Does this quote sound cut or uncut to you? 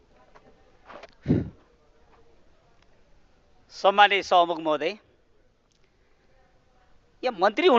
uncut